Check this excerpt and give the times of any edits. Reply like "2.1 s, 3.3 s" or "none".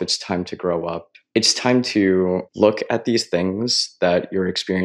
1.1 s, 2.5 s